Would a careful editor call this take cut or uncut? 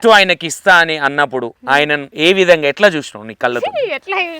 cut